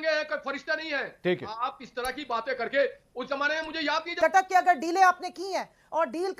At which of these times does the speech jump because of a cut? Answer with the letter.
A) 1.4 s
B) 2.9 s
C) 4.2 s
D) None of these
C